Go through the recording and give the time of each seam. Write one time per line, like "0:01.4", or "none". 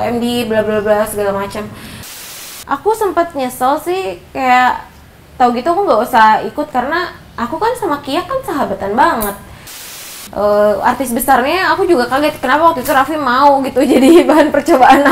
0:02.3
0:09.8

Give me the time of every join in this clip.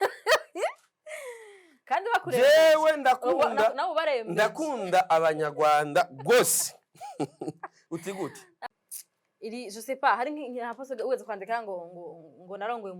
0:08.6

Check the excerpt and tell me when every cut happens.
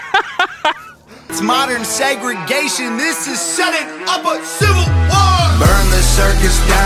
0:00.9

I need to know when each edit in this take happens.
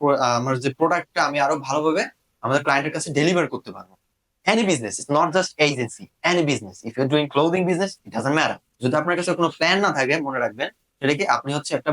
0:08.7

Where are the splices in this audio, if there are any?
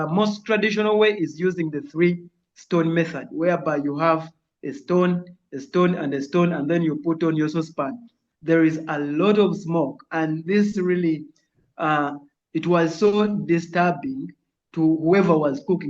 0:08.0

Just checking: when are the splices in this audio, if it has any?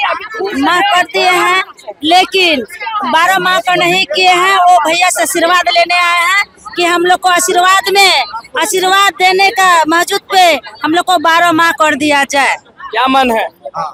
none

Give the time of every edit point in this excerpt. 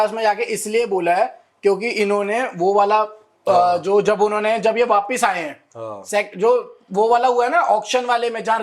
none

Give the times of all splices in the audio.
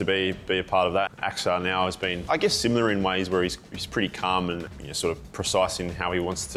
0:01.1
0:02.2
0:04.7

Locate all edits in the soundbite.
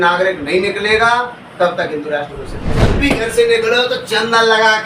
0:02.9

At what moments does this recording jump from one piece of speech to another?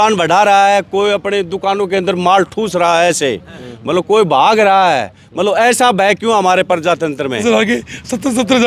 0:07.4

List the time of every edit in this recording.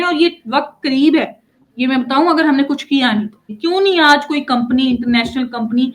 0:03.5

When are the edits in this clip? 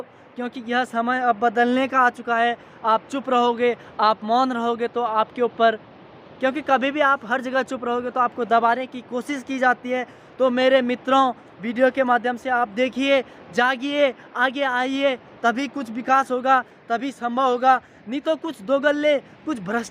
none

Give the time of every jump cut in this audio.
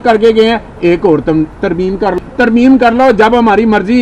0:02.2

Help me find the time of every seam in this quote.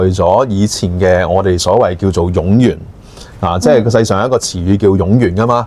none

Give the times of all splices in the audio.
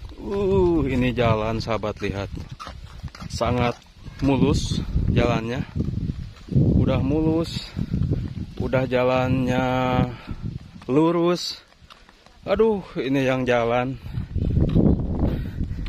none

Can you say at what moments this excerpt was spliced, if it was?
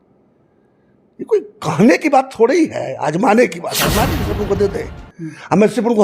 0:04.2

